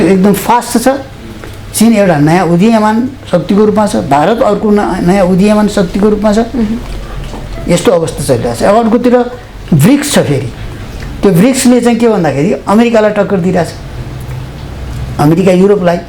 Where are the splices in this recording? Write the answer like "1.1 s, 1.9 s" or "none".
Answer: none